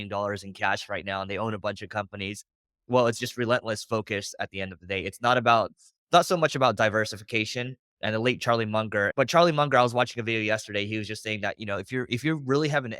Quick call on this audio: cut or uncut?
cut